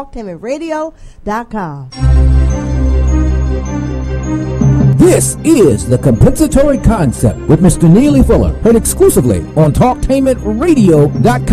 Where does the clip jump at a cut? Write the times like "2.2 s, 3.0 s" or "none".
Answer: 1.8 s